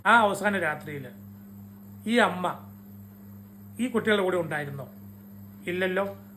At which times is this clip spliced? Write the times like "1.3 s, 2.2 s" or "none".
none